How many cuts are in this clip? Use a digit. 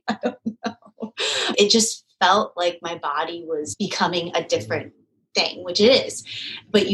2